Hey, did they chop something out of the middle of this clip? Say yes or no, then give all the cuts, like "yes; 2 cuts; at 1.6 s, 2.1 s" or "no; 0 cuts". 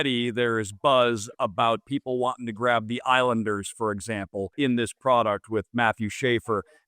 yes; 2 cuts; at 1.9 s, 4.5 s